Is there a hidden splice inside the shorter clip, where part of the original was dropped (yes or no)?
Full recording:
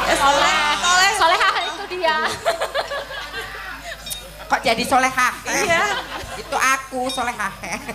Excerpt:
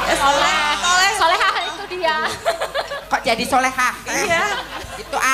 yes